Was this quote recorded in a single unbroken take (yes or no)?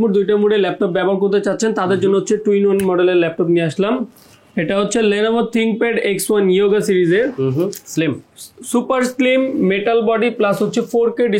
yes